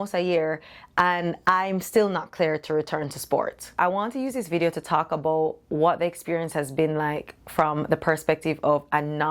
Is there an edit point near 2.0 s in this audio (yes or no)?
no